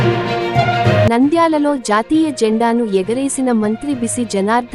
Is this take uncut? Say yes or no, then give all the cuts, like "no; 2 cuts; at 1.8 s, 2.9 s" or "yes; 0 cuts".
yes; 0 cuts